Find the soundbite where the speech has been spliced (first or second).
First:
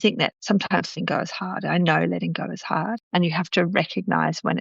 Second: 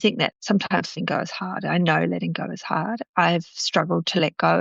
first